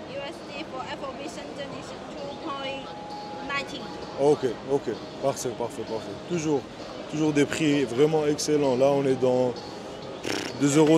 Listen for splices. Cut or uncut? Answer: uncut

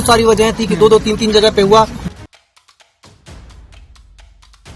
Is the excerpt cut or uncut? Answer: cut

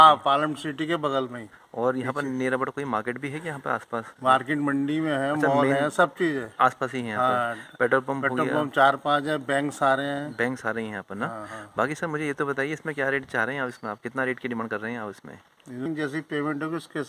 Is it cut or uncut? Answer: cut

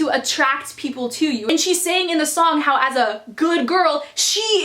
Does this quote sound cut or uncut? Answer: cut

